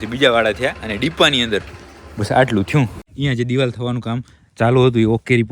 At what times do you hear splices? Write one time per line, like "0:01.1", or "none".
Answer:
0:03.0